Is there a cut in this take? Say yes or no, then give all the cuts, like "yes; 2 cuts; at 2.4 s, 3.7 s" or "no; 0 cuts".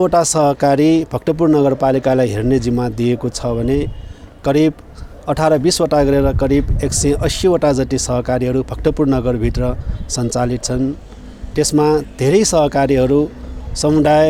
no; 0 cuts